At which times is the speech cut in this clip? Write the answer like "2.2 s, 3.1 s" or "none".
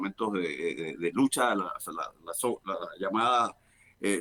none

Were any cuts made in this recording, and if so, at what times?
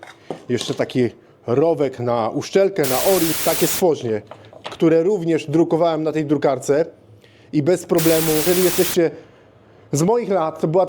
3.4 s, 8.5 s

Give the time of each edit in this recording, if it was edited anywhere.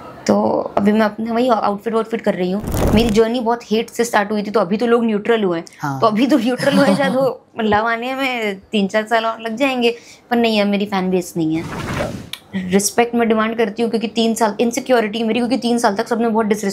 2.7 s, 12.0 s

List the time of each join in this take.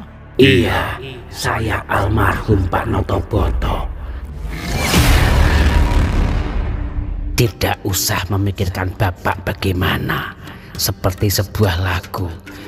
7.2 s

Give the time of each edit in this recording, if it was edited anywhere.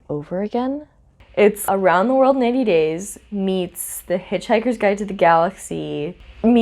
1.5 s

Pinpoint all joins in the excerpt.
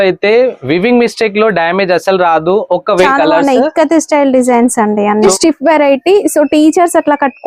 3.0 s, 5.3 s

